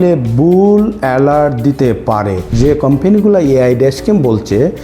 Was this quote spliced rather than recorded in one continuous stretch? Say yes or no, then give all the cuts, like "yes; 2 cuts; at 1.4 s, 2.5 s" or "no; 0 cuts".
yes; 1 cut; at 2.5 s